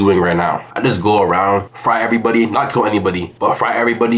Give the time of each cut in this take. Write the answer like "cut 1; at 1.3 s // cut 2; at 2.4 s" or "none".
none